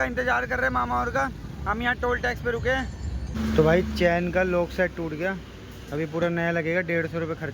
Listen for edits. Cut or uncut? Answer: cut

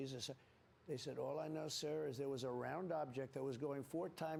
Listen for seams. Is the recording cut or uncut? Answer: uncut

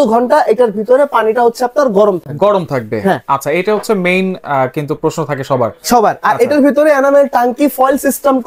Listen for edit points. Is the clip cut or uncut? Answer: uncut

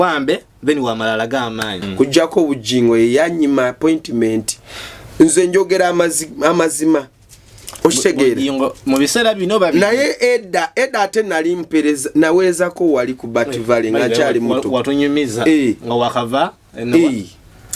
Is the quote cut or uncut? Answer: cut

